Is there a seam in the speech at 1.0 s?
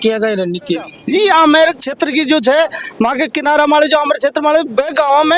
yes; 1 cut; at 1.0 s

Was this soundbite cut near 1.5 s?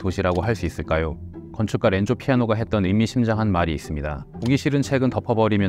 yes; 1 cut; at 1.5 s

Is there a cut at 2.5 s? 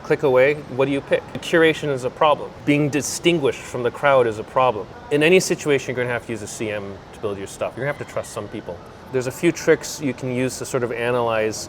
yes; 5 cuts; at 1.4 s, 2.5 s, 4.9 s, 7.7 s, 9.0 s

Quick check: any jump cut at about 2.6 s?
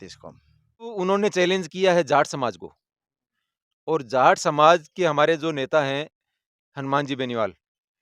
no; 1 cut; at 0.9 s

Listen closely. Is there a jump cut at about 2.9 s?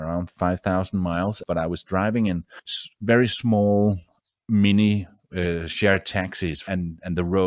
no; 2 cuts; at 1.4 s, 6.6 s

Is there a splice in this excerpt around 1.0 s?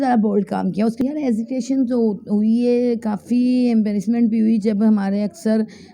yes; 1 cut; at 1.0 s

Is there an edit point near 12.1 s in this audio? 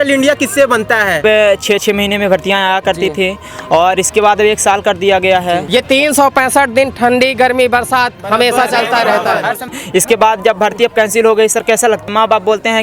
yes; 4 cuts; at 1.2 s, 5.7 s, 9.7 s, 12.1 s

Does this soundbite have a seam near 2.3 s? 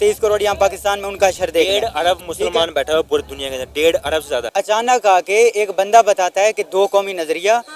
no; 1 cut; at 4.5 s

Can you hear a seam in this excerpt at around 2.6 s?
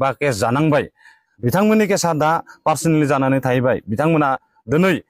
no; 1 cut; at 1.2 s

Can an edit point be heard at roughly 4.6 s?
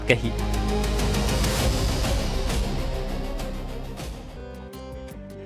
yes; 1 cut; at 4.6 s

